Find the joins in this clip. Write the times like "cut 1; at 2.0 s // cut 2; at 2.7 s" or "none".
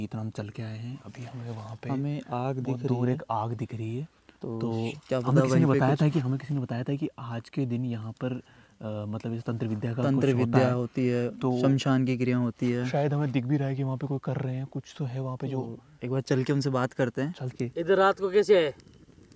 cut 1; at 17.5 s